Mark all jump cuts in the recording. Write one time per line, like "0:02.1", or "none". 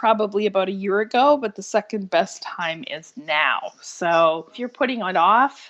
0:04.6